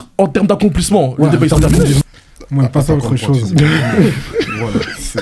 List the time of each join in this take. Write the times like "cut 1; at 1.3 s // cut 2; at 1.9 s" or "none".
cut 1; at 2.0 s